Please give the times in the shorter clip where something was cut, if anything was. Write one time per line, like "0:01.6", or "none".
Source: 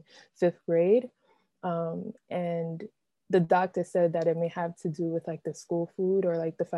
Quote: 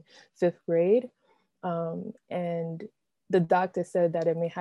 none